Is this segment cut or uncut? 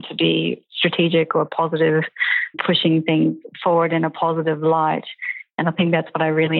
uncut